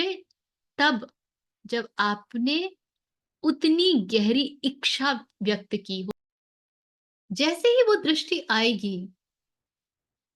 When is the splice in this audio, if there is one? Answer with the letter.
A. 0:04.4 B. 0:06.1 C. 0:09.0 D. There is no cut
B